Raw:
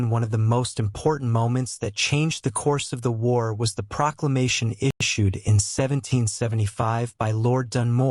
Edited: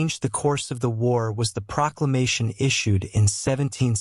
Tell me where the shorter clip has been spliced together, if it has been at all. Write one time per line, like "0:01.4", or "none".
0:02.8